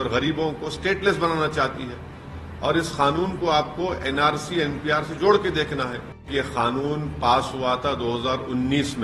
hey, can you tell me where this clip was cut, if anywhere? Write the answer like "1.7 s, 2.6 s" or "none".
6.2 s